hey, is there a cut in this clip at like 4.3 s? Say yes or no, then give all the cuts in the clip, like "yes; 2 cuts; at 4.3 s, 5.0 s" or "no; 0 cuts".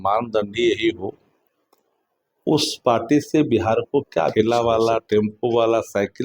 yes; 1 cut; at 4.3 s